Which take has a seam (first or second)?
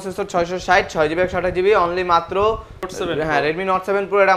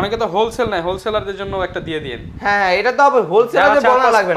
first